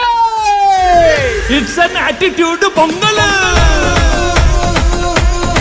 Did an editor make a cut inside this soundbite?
no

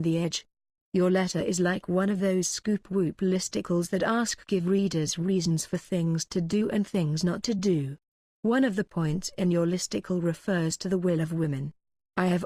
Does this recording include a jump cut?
no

